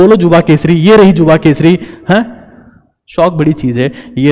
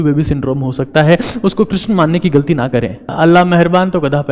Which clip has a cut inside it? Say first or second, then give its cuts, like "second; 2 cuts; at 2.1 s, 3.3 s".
second; 1 cut; at 3.1 s